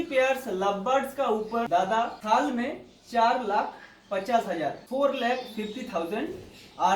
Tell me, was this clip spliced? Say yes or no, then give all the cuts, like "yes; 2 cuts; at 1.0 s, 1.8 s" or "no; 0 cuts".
yes; 2 cuts; at 2.1 s, 4.8 s